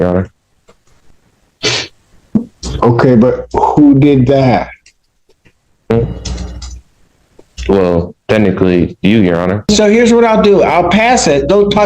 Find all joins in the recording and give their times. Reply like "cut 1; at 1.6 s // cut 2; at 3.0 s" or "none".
cut 1; at 9.7 s